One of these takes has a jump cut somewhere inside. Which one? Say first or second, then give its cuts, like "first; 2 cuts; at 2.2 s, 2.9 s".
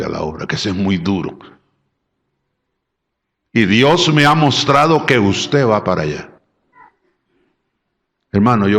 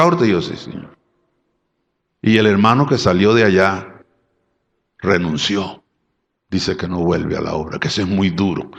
first; 1 cut; at 6.8 s